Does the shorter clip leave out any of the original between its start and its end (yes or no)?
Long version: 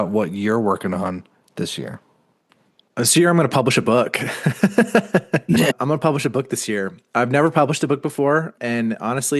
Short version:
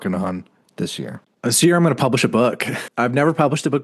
yes